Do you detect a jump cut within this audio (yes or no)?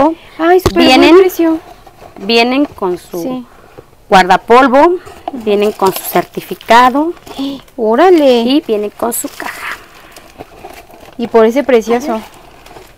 no